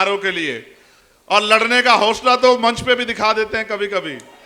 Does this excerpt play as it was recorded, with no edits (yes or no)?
yes